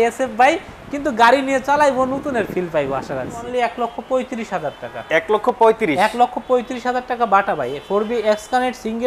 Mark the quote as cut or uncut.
cut